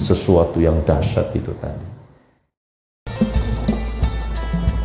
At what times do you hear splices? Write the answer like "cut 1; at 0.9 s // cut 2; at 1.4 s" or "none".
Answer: cut 1; at 3.1 s